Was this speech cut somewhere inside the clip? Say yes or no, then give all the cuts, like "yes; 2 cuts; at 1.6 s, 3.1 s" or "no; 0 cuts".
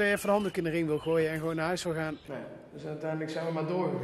yes; 1 cut; at 2.2 s